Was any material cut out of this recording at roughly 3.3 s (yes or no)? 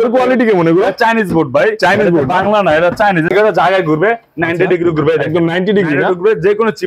yes